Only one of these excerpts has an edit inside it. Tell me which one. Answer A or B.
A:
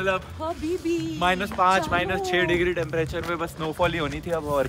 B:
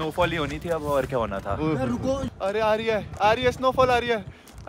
B